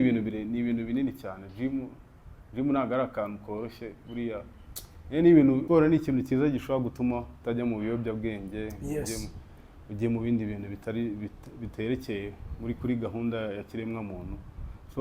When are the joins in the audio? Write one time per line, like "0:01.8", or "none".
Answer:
0:05.6